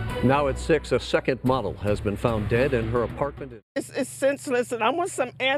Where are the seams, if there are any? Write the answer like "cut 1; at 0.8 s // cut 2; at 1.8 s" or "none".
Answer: cut 1; at 3.4 s